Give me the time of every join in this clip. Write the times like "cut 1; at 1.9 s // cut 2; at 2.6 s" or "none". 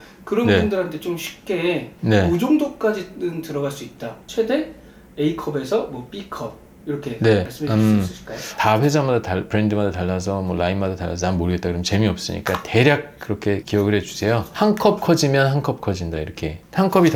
cut 1; at 1.9 s // cut 2; at 7.5 s // cut 3; at 8.5 s